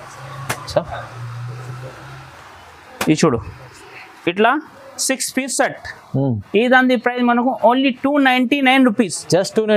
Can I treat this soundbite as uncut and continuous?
yes; 0 cuts

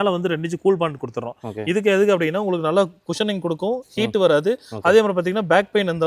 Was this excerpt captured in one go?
yes; 0 cuts

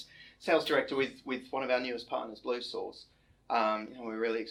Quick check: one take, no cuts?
yes; 0 cuts

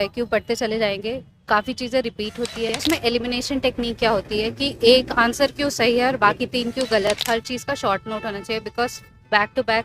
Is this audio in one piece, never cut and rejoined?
no; 2 cuts; at 2.8 s, 7.1 s

